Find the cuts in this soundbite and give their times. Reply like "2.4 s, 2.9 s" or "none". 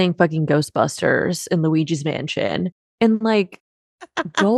none

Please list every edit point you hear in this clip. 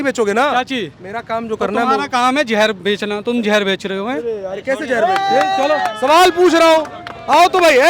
none

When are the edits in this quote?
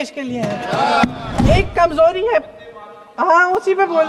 1.4 s

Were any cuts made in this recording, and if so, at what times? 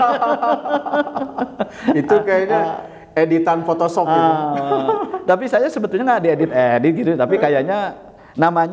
none

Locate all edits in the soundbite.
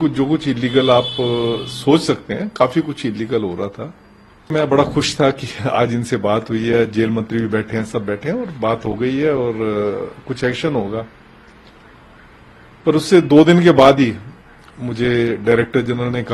4.5 s

